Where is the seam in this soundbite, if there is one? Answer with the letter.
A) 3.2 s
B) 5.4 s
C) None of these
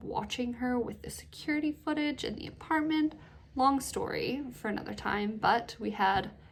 C